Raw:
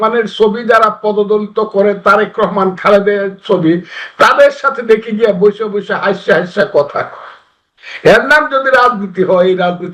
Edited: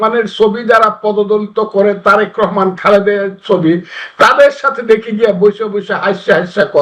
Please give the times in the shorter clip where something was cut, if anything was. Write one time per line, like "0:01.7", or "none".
none